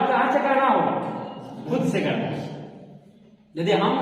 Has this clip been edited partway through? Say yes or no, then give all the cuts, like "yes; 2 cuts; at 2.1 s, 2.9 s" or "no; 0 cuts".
no; 0 cuts